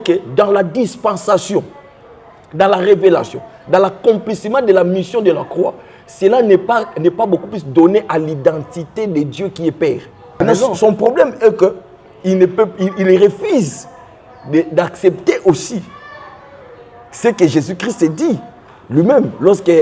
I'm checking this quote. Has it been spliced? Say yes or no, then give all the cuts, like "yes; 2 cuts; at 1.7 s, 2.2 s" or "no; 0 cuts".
yes; 1 cut; at 10.4 s